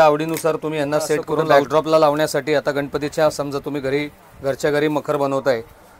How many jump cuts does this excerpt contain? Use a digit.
1